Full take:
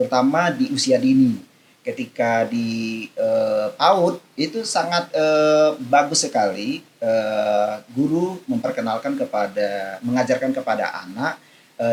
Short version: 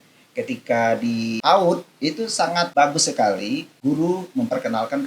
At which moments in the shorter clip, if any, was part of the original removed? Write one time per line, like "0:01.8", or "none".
0:01.4
0:02.7
0:03.7